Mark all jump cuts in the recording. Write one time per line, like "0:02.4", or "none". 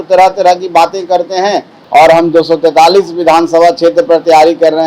0:01.7